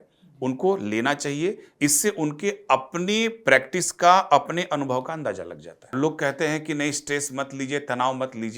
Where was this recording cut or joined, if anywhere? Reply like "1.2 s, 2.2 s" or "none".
5.9 s